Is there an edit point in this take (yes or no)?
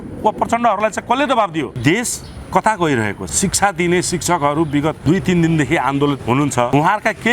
yes